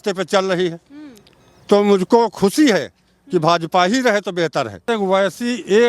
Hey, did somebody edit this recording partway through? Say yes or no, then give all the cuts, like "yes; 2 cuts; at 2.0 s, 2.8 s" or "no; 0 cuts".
yes; 1 cut; at 4.8 s